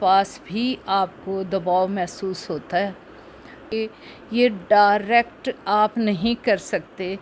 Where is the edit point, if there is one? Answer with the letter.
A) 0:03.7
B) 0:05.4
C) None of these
A